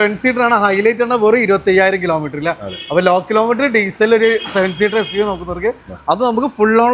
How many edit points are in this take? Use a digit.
0